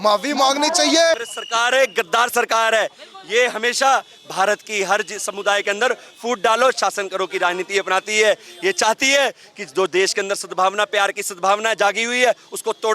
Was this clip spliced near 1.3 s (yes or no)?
yes